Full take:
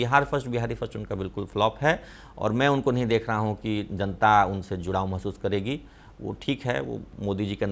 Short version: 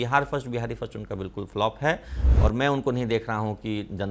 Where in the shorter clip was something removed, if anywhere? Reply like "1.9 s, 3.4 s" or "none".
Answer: none